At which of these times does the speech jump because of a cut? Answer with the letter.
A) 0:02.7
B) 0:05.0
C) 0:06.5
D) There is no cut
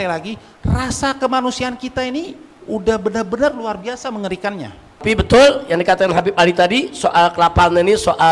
B